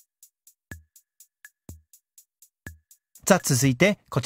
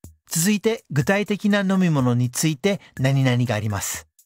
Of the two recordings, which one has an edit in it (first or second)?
first